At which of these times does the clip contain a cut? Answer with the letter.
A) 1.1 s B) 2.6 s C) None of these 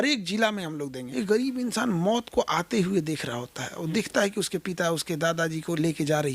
A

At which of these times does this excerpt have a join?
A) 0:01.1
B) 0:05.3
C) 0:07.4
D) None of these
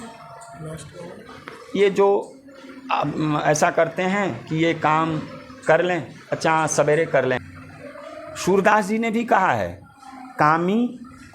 C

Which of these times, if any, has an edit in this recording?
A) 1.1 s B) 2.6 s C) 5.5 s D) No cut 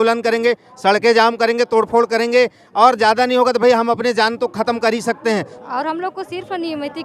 C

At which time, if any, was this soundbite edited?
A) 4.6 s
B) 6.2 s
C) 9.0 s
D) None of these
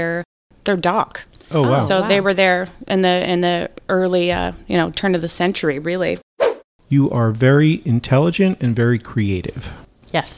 B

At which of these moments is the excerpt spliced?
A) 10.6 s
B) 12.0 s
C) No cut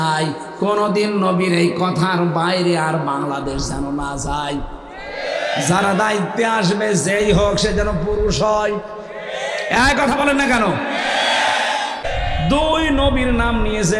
B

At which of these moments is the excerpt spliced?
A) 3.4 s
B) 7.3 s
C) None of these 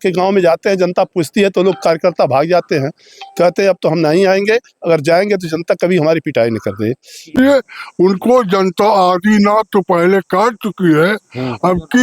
B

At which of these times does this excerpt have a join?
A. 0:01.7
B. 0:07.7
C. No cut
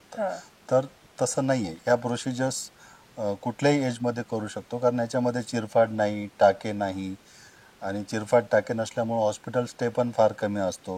A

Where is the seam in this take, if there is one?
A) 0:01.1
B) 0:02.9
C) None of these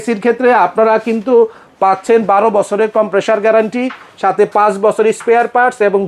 C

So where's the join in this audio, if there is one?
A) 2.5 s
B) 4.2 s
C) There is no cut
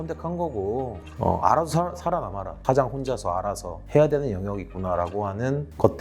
A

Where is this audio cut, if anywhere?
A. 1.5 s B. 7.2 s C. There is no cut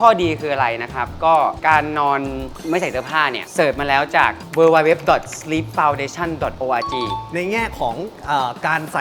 B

